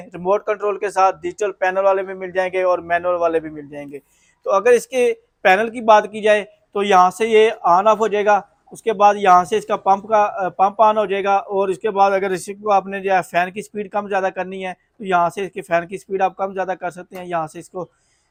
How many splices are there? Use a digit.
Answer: 0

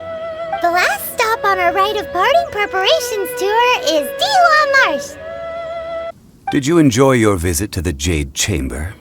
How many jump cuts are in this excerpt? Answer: 1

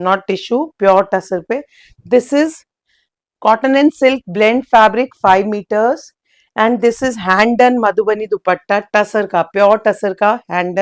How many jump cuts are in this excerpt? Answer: 0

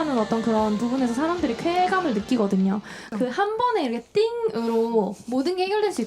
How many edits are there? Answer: 1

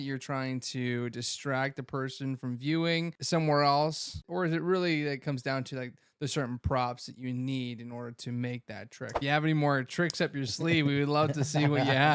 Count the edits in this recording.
3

